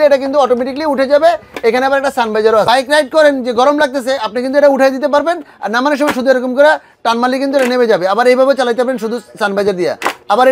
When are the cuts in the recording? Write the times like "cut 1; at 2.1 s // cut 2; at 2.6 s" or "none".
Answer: cut 1; at 2.6 s